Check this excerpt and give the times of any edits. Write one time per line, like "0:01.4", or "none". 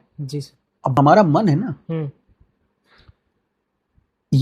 0:01.0